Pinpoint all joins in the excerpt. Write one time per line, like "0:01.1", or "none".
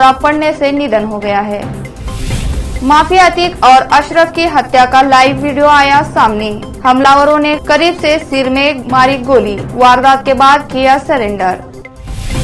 none